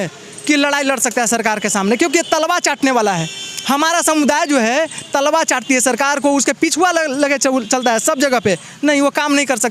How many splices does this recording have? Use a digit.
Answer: 0